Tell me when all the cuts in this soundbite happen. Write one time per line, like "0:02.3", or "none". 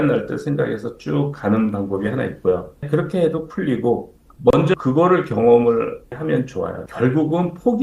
0:02.8
0:04.2
0:06.1